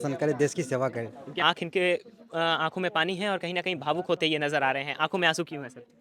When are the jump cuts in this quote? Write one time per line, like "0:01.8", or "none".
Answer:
0:01.2